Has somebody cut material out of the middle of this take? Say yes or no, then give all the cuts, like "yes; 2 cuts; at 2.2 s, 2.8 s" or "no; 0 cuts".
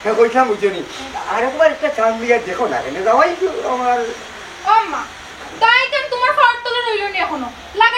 no; 0 cuts